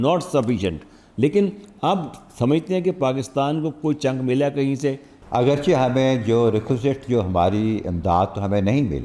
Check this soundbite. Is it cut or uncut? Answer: cut